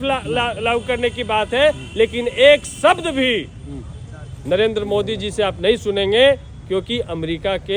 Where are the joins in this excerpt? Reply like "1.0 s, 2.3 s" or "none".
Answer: none